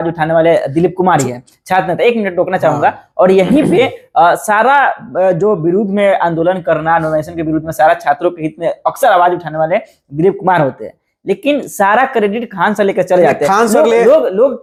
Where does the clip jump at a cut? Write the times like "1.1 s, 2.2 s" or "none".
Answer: none